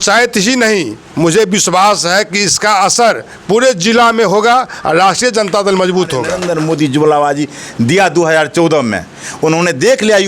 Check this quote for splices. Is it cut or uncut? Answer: cut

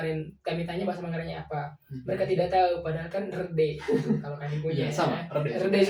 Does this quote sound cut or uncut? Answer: uncut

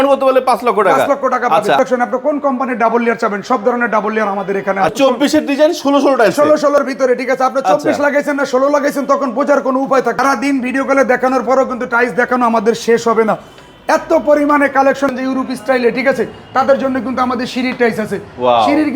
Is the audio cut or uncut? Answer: cut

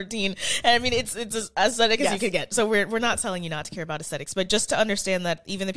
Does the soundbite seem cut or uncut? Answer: uncut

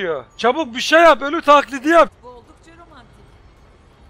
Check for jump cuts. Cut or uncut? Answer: uncut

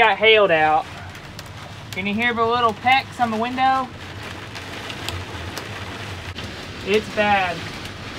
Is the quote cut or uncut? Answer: uncut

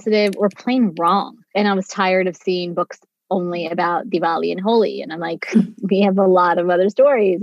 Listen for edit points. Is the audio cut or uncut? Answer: cut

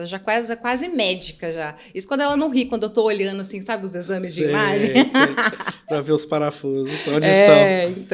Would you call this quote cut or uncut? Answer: uncut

